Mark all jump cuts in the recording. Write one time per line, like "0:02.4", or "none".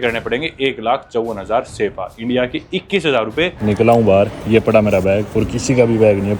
0:03.6